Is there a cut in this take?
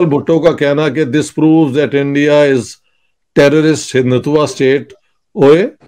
no; 0 cuts

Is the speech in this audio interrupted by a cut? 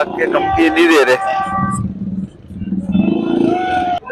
no; 0 cuts

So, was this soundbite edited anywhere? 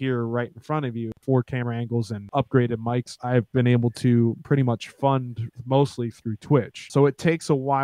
yes; 4 cuts; at 1.2 s, 2.2 s, 3.1 s, 6.8 s

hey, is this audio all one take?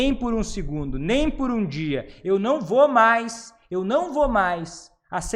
yes; 0 cuts

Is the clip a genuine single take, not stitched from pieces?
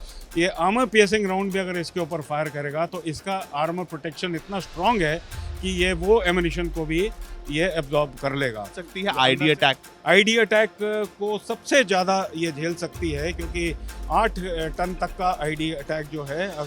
no; 1 cut; at 8.9 s

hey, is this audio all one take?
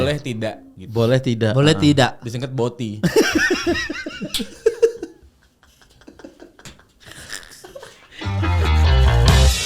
no; 1 cut; at 8.5 s

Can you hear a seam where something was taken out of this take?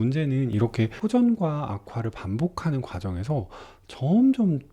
yes; 1 cut; at 0.9 s

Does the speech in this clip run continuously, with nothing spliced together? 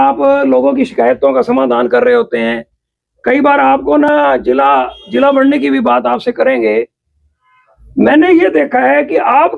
yes; 0 cuts

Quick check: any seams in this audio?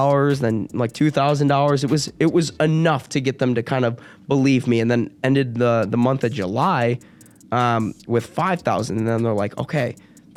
no; 0 cuts

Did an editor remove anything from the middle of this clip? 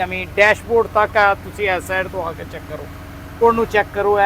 yes; 1 cut; at 3.3 s

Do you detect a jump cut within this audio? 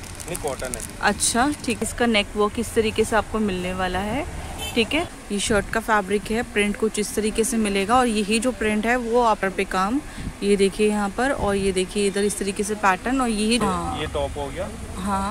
yes; 4 cuts; at 1.8 s, 5.2 s, 9.4 s, 13.6 s

